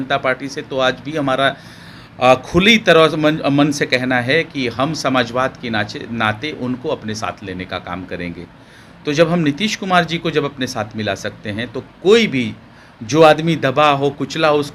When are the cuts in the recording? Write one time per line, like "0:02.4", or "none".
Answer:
none